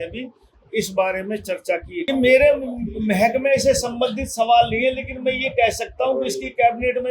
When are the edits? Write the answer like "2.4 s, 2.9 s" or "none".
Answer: 2.1 s